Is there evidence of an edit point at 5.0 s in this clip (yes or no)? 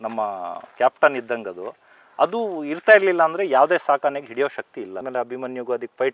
yes